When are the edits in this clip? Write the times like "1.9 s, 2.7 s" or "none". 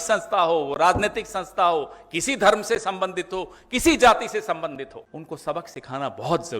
5.1 s